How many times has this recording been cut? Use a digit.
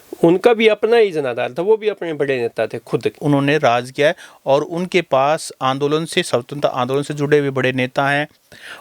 1